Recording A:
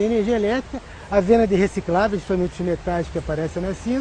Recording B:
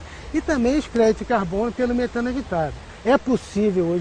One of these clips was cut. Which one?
B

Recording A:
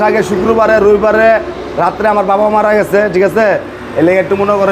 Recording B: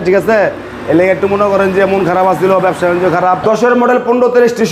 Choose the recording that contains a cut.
B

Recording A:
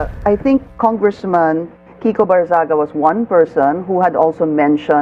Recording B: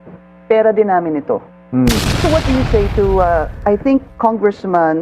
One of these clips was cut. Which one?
B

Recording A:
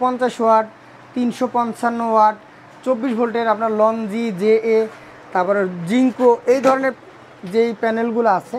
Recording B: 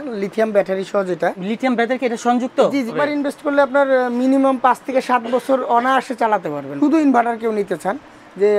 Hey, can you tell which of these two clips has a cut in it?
B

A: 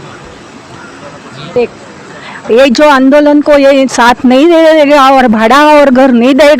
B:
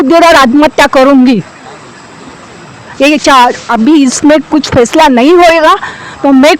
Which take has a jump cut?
A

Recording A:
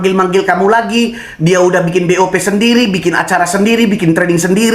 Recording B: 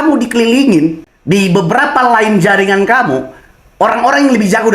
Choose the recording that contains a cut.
B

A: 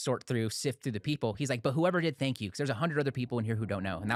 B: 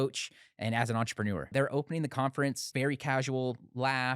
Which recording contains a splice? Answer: B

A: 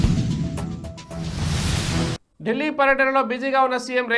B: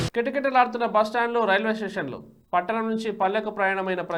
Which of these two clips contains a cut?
A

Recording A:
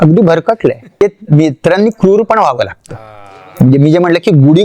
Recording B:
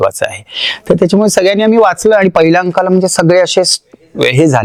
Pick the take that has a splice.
A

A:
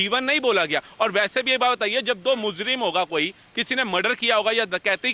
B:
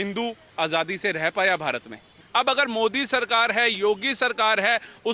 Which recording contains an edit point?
B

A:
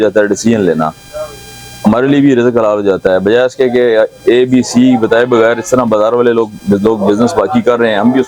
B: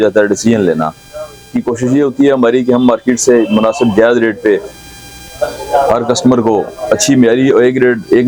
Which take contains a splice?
B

